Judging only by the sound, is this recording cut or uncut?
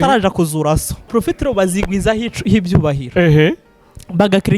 cut